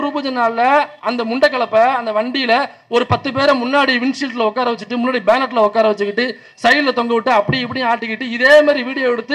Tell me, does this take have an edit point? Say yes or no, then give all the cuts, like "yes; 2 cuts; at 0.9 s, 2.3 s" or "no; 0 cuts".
no; 0 cuts